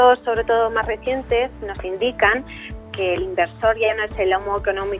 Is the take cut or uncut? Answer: cut